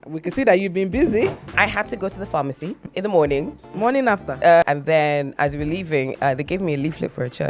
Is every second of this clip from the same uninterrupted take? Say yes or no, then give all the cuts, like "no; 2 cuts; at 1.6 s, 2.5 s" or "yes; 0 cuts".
no; 4 cuts; at 1.4 s, 2.8 s, 3.7 s, 4.6 s